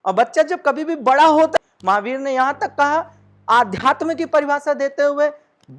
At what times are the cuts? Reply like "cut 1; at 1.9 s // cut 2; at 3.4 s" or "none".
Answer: cut 1; at 1.6 s